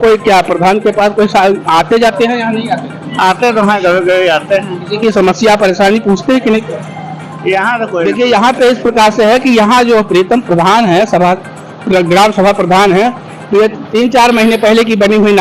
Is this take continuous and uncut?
no; 1 cut; at 8.0 s

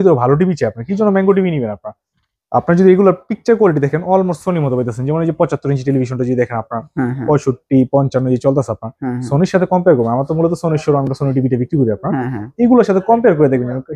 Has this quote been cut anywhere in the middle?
no; 0 cuts

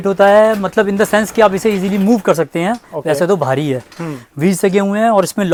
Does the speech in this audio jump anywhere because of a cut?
no; 0 cuts

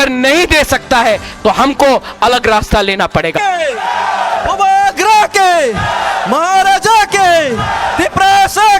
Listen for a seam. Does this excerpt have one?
yes; 1 cut; at 3.4 s

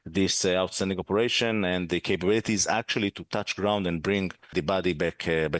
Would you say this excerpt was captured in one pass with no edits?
no; 1 cut; at 4.5 s

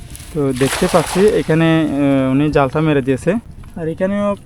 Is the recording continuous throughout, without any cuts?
no; 1 cut; at 3.5 s

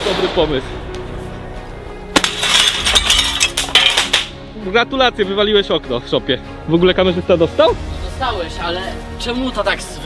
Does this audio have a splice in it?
yes; 1 cut; at 1.3 s

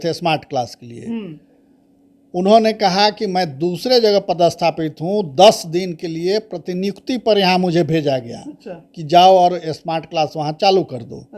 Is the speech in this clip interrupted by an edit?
no; 0 cuts

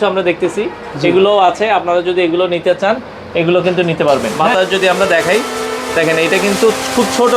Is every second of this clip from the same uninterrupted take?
no; 1 cut; at 4.3 s

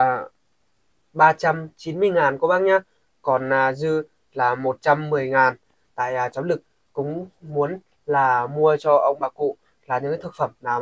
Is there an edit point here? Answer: no; 0 cuts

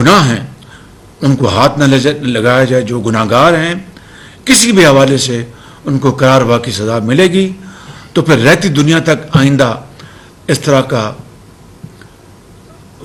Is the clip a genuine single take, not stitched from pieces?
yes; 0 cuts

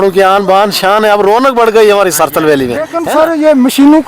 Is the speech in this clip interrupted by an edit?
yes; 1 cut; at 3.0 s

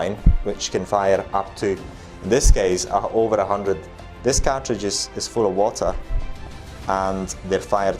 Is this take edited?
yes; 1 cut; at 3.9 s

